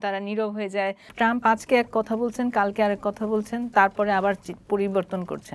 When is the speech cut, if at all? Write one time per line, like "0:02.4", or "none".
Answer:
0:01.1